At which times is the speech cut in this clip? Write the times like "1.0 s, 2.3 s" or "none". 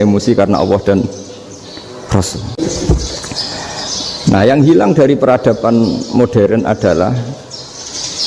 2.5 s